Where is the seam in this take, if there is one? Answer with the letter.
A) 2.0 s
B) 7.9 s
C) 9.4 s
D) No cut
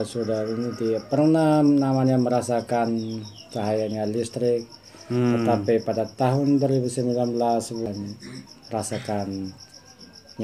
B